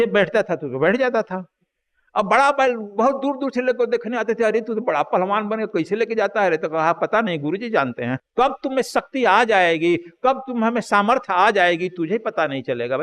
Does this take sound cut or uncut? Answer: cut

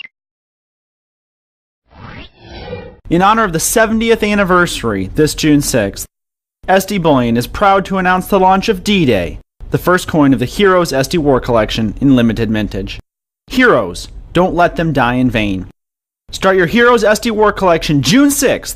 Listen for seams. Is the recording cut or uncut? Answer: uncut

